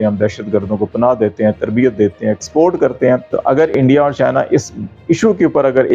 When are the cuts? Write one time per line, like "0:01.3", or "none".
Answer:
0:03.3